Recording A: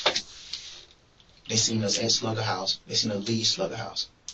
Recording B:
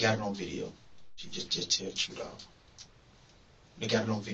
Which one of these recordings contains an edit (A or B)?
B